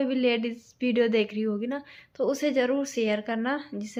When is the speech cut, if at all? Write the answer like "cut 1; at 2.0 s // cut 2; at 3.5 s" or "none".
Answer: none